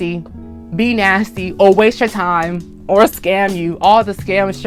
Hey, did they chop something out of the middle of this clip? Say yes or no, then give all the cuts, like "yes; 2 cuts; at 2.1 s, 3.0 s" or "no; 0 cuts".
no; 0 cuts